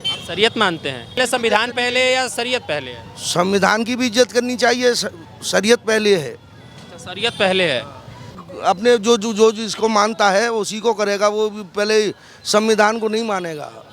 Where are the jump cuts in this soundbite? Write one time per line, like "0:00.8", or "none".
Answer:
0:01.2
0:08.4